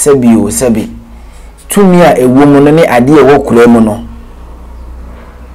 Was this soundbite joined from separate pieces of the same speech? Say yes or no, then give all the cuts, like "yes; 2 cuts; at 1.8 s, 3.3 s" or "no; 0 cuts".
no; 0 cuts